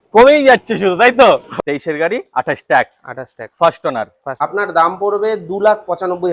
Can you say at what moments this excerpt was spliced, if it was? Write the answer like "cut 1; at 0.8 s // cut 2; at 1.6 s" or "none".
cut 1; at 1.5 s // cut 2; at 4.2 s